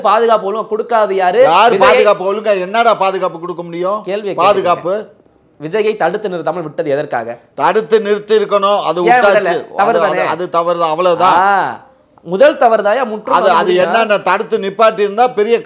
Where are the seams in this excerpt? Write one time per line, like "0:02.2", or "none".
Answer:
none